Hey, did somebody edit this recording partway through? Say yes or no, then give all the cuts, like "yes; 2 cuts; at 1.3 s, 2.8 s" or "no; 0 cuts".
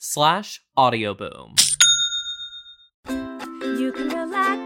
yes; 1 cut; at 3.0 s